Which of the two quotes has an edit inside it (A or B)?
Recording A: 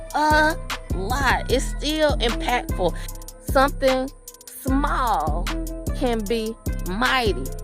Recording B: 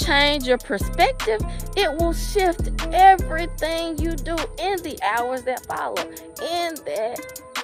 A